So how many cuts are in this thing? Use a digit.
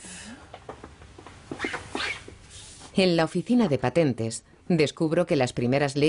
1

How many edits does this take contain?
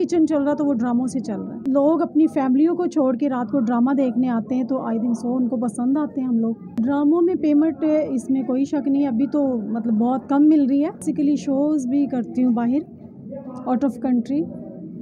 3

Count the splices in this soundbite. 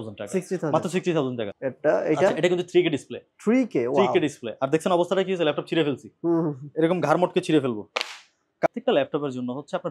2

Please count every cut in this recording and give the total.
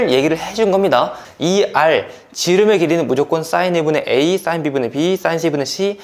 1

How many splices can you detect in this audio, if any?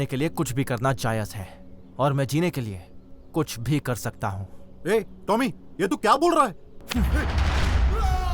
1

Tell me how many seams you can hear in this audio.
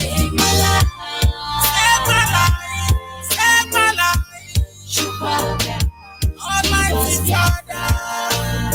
0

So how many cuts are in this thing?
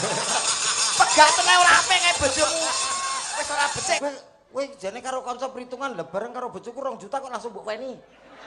1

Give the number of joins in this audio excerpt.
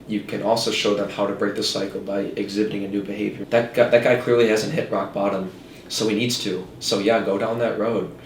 1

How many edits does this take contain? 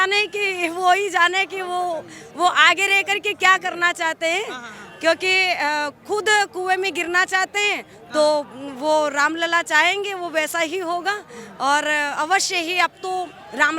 0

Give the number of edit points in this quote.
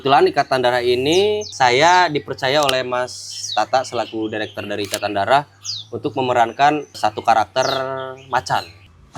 1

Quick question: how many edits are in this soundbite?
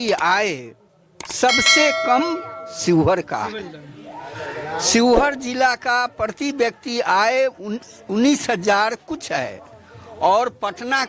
0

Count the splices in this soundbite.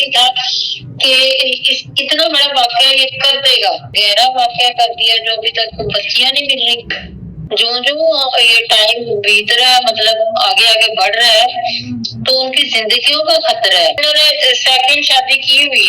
3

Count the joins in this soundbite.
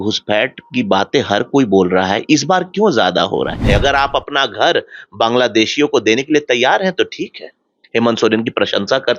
1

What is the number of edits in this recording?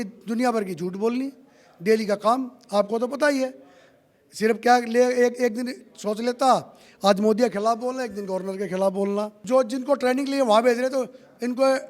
1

